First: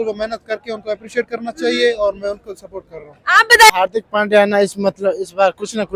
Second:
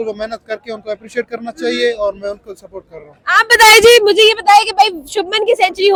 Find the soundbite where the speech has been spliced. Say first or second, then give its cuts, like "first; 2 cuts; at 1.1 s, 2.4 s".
first; 1 cut; at 3.7 s